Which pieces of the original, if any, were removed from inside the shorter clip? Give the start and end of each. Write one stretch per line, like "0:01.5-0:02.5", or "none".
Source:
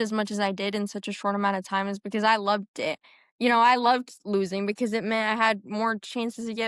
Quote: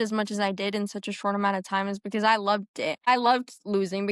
0:03.1-0:03.7